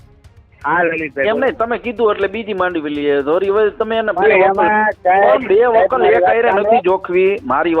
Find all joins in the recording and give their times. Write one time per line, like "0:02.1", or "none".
none